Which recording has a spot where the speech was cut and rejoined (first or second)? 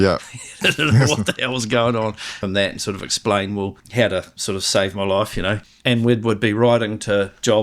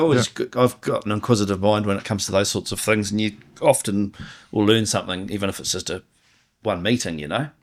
first